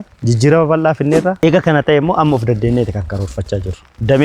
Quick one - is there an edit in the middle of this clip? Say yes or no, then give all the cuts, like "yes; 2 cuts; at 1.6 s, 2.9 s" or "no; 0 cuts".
yes; 1 cut; at 1.4 s